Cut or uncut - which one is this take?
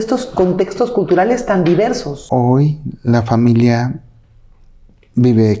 cut